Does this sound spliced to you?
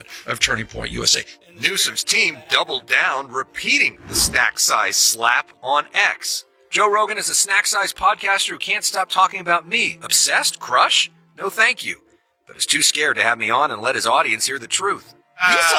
no; 0 cuts

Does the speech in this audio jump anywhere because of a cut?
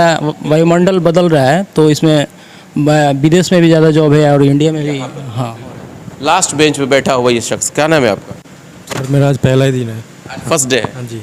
no; 0 cuts

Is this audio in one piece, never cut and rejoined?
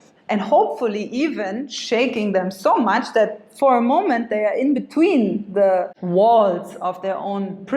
no; 1 cut; at 6.0 s

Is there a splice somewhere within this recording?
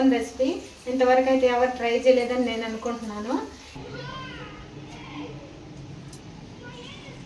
yes; 1 cut; at 3.7 s

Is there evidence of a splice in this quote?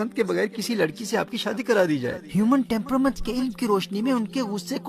yes; 1 cut; at 2.2 s

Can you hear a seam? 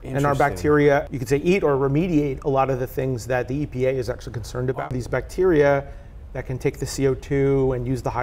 yes; 2 cuts; at 1.1 s, 4.8 s

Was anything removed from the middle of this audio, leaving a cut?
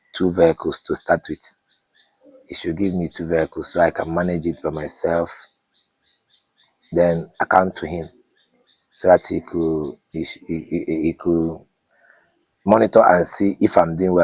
no; 0 cuts

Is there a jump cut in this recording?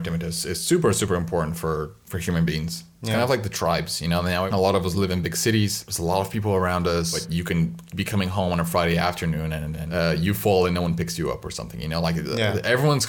yes; 5 cuts; at 2.0 s, 4.5 s, 5.9 s, 7.2 s, 9.8 s

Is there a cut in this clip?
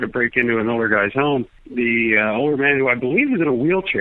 yes; 1 cut; at 1.6 s

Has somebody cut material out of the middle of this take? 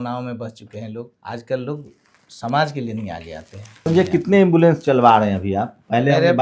yes; 2 cuts; at 1.2 s, 3.8 s

